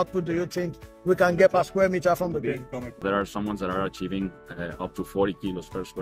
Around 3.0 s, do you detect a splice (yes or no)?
yes